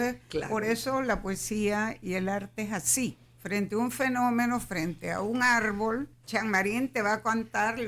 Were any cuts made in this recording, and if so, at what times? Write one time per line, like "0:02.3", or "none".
0:03.3
0:06.2